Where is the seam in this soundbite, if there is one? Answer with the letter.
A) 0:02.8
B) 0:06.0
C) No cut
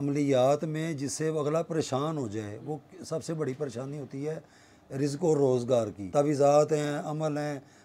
B